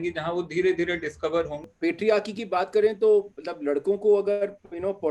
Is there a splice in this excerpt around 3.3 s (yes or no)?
no